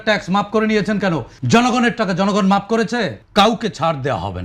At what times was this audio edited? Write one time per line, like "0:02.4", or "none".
0:01.3
0:03.2